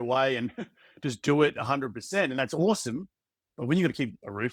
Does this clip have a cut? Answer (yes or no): no